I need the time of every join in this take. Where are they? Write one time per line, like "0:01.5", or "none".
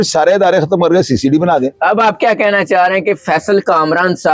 none